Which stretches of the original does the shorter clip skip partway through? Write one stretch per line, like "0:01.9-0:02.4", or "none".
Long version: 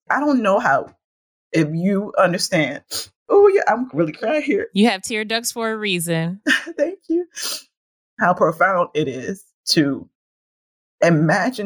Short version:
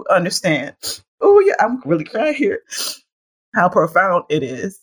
0:04.7-0:07.3